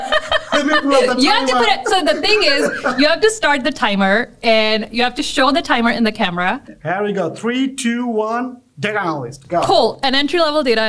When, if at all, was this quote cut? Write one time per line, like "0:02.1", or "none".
0:06.7